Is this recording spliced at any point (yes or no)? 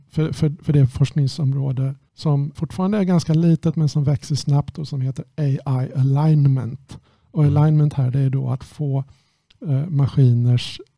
yes